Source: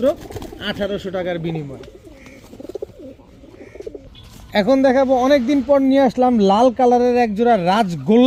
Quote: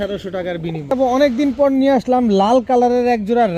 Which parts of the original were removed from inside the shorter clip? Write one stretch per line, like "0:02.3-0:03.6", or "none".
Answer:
0:01.7-0:05.0